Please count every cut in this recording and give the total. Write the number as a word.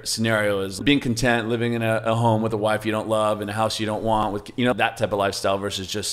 two